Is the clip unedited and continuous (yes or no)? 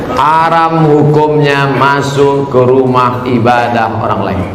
yes